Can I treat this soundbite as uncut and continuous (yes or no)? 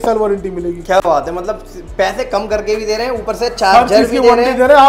yes